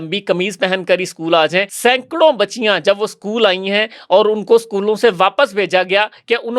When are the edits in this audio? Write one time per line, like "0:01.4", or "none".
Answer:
0:01.7

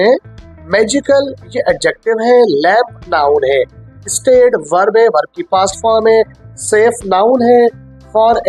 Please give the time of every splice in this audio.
none

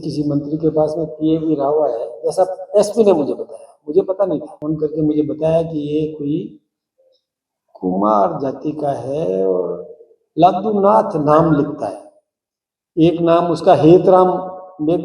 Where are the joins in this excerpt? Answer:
0:04.5

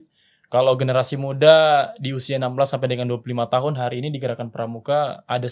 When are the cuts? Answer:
none

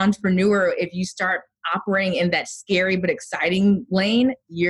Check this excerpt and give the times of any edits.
none

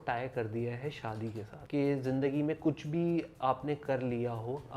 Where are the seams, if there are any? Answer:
0:01.5

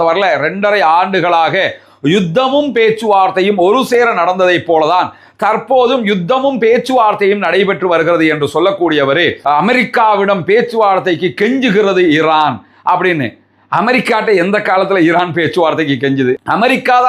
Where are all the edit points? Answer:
0:09.4

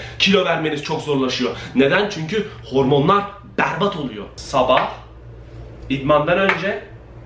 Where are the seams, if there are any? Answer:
0:04.3

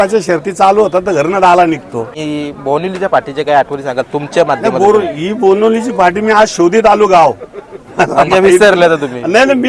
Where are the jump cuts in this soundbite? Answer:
0:02.2

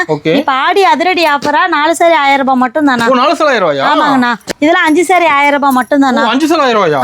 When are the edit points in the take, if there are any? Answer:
0:04.5

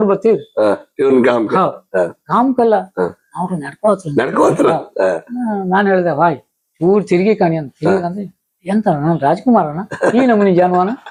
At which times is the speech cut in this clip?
none

